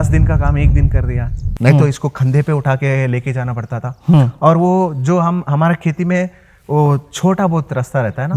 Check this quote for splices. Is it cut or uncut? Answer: cut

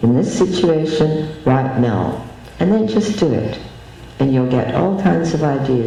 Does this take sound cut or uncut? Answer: uncut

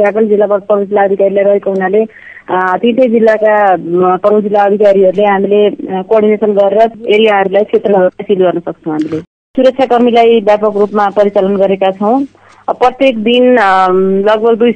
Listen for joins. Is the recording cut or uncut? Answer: cut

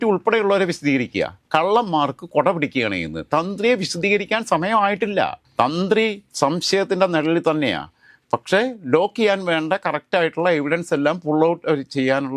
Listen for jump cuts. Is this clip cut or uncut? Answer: uncut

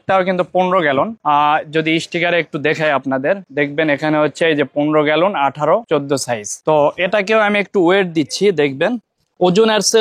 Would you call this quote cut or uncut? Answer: uncut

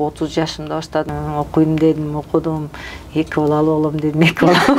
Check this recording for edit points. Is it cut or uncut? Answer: cut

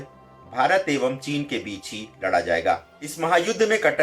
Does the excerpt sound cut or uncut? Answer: cut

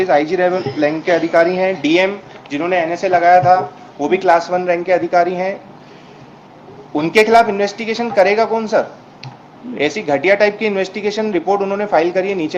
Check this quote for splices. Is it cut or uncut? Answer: uncut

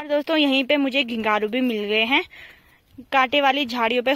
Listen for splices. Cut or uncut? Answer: uncut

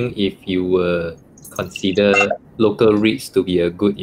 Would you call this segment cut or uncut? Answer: uncut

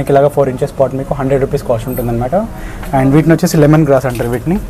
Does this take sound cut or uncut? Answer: uncut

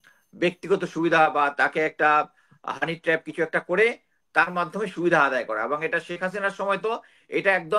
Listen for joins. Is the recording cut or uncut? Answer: uncut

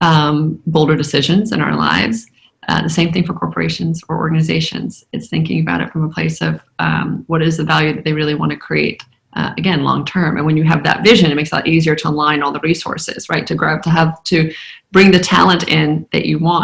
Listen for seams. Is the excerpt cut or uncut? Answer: uncut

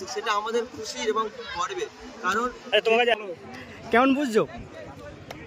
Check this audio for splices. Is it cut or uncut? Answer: cut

